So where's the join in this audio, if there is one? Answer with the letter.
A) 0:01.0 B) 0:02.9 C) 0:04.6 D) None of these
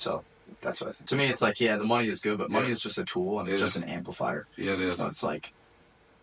A